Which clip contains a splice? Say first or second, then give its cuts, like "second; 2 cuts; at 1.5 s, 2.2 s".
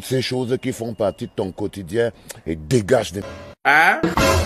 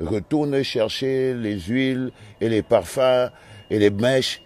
first; 1 cut; at 3.2 s